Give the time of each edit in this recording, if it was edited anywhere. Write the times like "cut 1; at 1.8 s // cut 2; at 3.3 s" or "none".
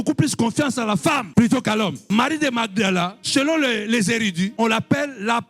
cut 1; at 2.0 s